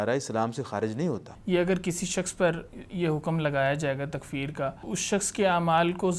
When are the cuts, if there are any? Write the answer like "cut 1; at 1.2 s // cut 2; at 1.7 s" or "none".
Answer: cut 1; at 1.3 s // cut 2; at 4.8 s